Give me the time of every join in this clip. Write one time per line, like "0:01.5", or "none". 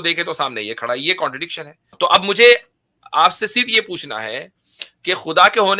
0:01.9